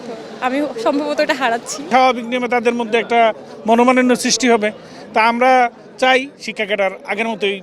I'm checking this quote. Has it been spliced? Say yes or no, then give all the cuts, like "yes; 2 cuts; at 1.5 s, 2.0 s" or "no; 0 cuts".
yes; 1 cut; at 1.9 s